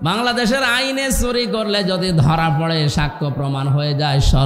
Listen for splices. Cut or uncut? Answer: uncut